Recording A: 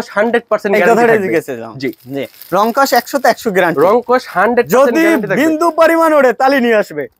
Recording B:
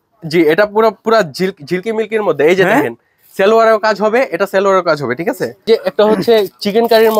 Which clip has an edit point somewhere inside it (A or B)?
B